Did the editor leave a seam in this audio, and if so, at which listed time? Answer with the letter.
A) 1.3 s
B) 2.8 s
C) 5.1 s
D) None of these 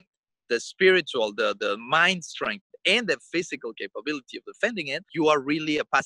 C